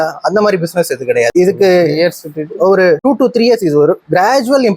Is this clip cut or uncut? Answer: cut